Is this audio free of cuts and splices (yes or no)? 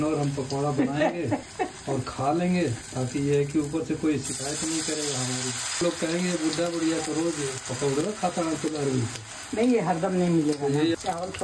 yes